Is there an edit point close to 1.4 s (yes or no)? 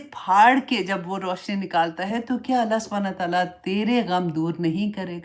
no